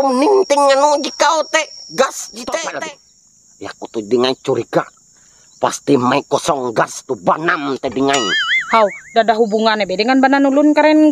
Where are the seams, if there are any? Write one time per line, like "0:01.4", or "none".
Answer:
0:02.8